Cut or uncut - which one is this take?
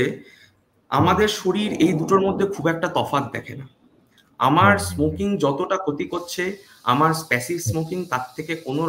uncut